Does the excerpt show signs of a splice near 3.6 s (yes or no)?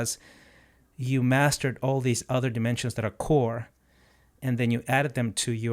no